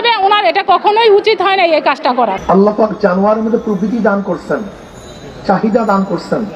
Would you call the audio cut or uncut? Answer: cut